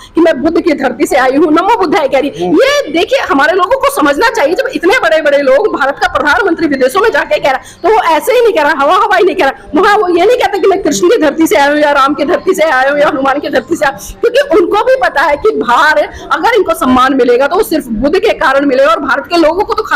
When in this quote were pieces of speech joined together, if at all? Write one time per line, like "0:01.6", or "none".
none